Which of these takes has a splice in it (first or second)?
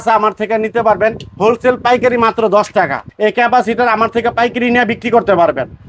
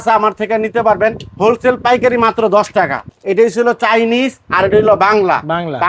first